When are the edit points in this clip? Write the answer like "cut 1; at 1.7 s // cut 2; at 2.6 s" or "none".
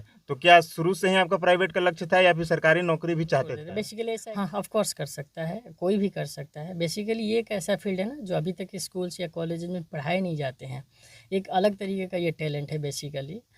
cut 1; at 4.0 s